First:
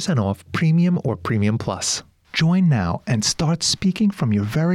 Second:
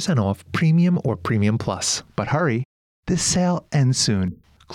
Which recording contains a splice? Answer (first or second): first